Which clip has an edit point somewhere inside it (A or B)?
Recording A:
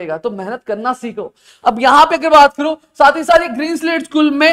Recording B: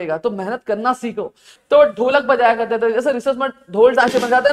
B